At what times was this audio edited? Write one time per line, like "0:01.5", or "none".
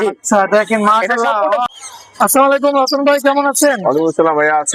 0:01.7